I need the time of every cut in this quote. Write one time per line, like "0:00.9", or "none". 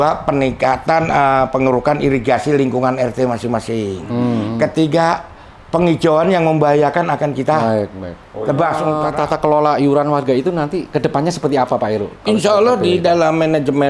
0:08.9